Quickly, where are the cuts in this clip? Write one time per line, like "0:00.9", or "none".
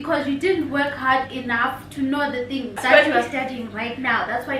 0:02.8